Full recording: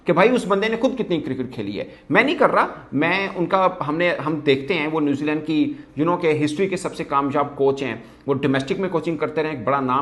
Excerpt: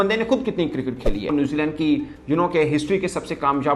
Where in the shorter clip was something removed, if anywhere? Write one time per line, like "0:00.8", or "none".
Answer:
0:01.3